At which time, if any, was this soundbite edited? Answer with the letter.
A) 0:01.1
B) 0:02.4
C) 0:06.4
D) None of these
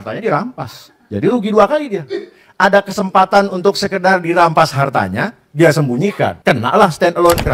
C